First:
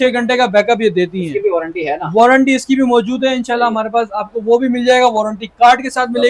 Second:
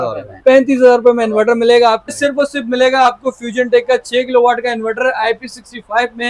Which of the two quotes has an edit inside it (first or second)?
second